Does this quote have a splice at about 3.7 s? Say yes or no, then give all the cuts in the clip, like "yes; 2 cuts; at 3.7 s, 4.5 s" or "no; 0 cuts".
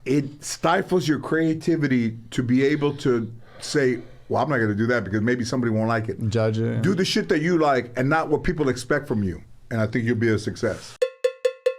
no; 1 cut; at 10.9 s